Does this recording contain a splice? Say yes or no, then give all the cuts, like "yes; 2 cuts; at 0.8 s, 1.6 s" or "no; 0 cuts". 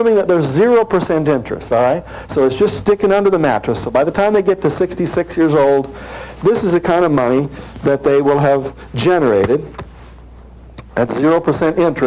yes; 1 cut; at 1.4 s